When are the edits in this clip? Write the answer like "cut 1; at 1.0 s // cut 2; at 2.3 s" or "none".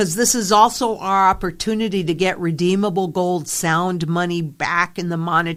none